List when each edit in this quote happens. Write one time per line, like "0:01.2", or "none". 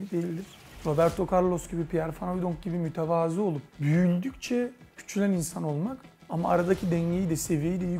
none